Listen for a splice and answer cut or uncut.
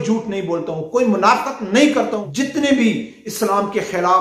cut